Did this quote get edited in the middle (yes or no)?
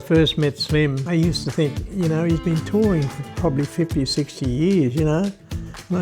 yes